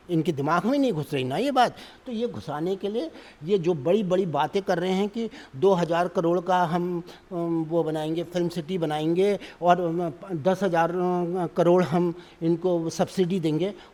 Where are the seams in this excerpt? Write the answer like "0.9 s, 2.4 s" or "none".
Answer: none